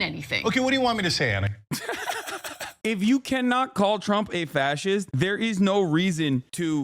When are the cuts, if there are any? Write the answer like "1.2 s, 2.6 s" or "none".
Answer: 2.7 s, 5.1 s